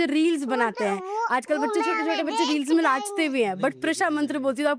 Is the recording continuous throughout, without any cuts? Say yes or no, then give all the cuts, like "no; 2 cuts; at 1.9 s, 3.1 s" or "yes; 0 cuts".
yes; 0 cuts